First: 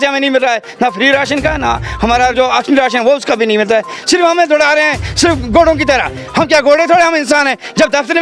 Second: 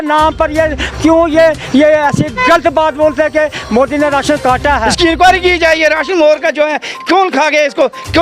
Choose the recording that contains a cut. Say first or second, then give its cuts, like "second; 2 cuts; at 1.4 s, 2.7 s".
second; 1 cut; at 4.9 s